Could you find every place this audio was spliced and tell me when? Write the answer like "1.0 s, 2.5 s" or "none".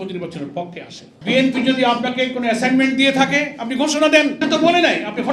1.1 s, 4.4 s